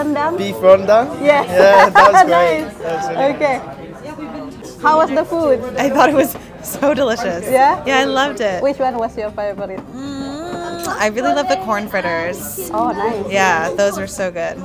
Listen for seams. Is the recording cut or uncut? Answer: uncut